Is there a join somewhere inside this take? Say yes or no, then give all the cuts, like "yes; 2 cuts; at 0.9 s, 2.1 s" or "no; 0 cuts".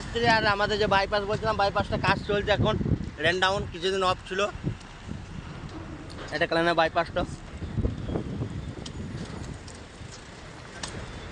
no; 0 cuts